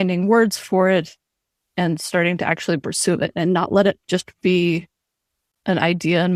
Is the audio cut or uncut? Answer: uncut